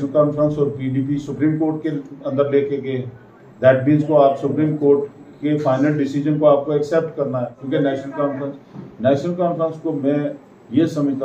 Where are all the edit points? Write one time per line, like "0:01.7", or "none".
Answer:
0:07.6